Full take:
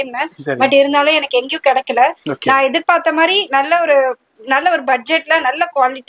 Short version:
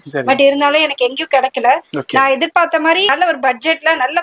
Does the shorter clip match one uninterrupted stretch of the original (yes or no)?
no